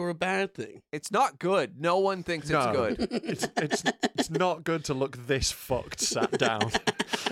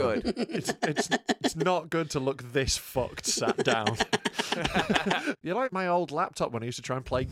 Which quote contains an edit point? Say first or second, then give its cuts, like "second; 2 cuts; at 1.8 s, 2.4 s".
second; 1 cut; at 5.6 s